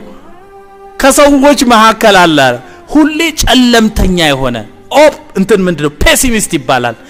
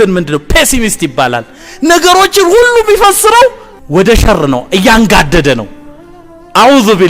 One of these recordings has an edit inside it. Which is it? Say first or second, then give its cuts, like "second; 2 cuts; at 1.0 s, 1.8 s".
second; 1 cut; at 3.7 s